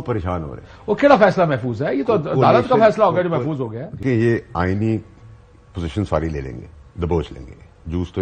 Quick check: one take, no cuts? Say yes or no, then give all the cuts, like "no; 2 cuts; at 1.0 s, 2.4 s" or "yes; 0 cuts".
no; 1 cut; at 4.0 s